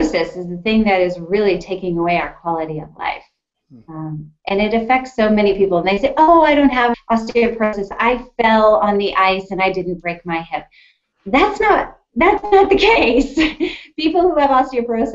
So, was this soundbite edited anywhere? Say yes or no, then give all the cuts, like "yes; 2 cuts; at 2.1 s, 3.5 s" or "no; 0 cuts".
no; 0 cuts